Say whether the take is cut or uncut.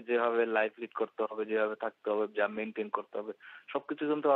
uncut